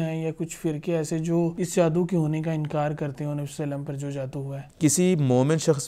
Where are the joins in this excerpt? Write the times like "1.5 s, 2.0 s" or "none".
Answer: 1.5 s, 4.7 s